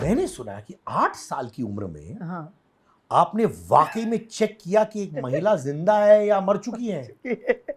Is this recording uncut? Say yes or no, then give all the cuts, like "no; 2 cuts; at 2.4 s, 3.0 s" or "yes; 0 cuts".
yes; 0 cuts